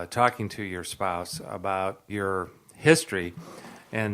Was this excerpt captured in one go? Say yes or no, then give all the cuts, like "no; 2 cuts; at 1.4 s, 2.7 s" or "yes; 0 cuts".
no; 1 cut; at 2.0 s